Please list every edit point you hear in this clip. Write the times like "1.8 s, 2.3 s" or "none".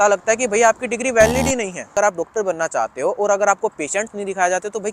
1.9 s